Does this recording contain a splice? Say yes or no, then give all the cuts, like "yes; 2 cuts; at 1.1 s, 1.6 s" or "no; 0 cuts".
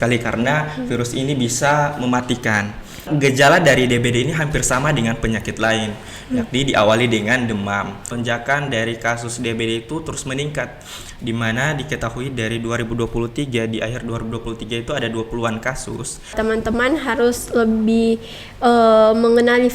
yes; 3 cuts; at 3.1 s, 8.1 s, 16.4 s